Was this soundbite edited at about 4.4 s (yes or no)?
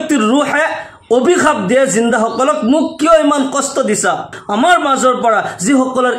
yes